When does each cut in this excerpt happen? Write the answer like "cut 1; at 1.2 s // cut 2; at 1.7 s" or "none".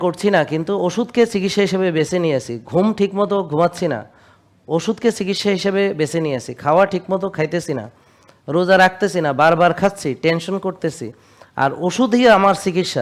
none